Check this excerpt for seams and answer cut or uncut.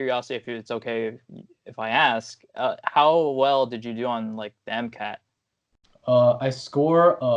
uncut